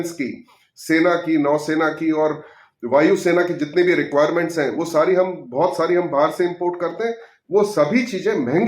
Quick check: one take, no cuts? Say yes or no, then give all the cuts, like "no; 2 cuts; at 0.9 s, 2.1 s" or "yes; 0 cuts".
yes; 0 cuts